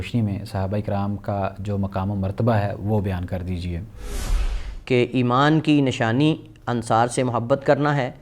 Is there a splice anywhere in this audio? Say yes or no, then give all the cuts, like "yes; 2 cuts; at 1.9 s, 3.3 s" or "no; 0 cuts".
yes; 1 cut; at 4.2 s